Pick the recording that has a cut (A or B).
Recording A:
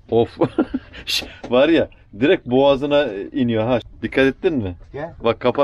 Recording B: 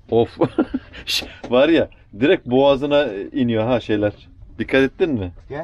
A